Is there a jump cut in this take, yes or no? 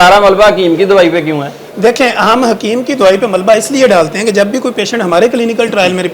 no